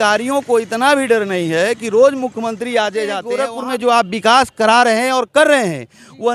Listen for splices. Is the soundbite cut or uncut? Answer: cut